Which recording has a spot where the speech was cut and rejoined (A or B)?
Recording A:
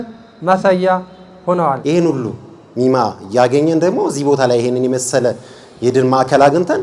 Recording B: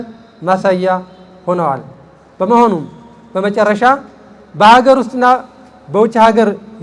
A